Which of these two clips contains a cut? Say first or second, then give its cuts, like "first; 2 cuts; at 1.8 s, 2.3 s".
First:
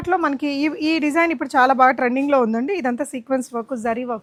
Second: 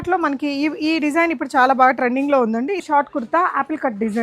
second; 1 cut; at 2.8 s